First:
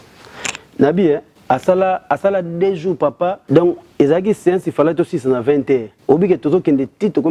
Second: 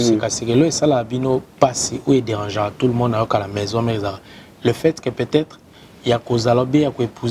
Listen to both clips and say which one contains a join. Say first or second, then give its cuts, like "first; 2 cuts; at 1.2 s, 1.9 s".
first; 3 cuts; at 1.3 s, 3.4 s, 5.9 s